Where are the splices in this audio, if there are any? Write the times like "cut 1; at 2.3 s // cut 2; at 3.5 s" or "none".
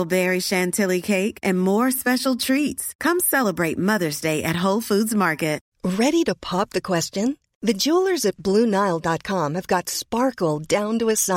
cut 1; at 5.7 s